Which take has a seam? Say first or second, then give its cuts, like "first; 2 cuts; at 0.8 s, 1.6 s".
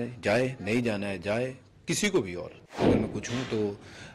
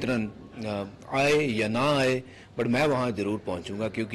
first; 1 cut; at 2.8 s